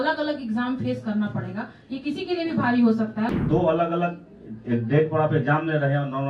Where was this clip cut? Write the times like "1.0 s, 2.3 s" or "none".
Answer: 3.4 s